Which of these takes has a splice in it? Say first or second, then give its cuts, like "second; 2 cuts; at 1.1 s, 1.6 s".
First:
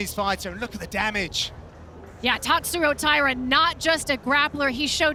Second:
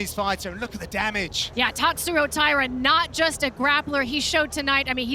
second; 1 cut; at 1.4 s